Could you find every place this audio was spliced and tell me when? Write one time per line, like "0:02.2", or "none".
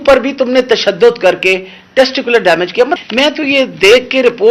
0:03.0